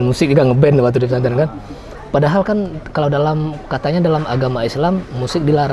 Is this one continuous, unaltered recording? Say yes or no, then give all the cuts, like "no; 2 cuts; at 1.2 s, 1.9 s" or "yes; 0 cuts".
yes; 0 cuts